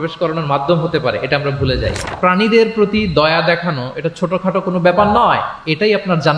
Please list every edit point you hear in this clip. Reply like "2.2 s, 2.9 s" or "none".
2.1 s